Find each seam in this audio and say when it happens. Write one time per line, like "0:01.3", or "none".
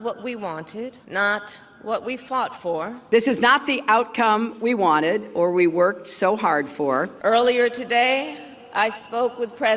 0:01.0
0:03.0

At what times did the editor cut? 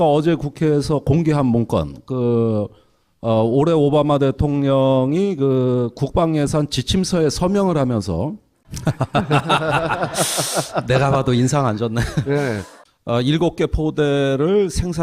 0:07.6

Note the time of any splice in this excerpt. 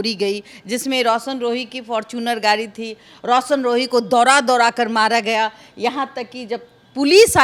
none

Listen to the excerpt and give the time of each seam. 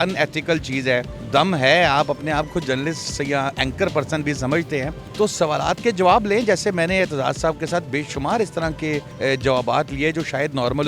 0:01.2
0:05.0
0:09.1

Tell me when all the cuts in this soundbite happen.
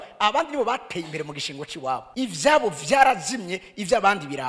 0:02.1

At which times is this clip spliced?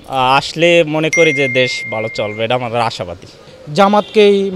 0:03.4

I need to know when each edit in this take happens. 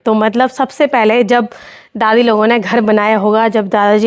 none

